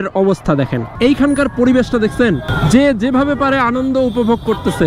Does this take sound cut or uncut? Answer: cut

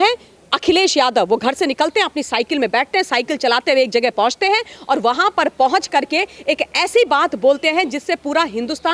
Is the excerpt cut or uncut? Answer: uncut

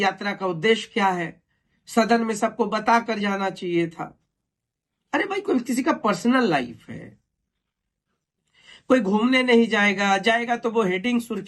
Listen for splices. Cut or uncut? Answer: uncut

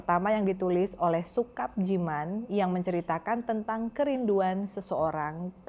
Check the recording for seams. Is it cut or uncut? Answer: uncut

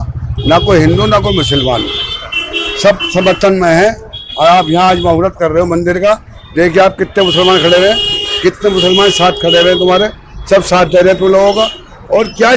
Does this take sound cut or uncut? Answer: uncut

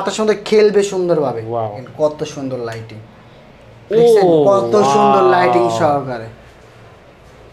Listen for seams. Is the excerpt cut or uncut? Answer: cut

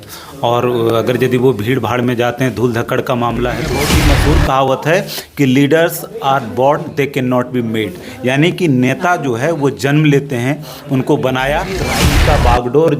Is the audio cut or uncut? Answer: cut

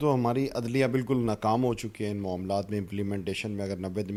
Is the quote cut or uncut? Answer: uncut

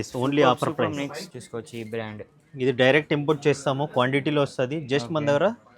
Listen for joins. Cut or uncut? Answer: cut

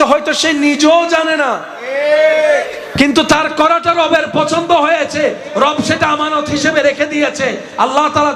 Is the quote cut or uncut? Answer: uncut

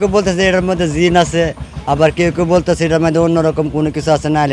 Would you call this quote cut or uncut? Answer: uncut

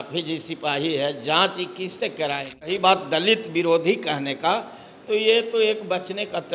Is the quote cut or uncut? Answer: cut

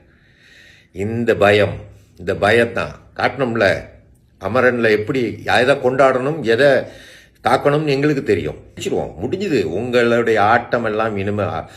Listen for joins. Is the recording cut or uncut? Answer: cut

